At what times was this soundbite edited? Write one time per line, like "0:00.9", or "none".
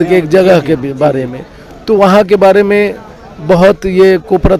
none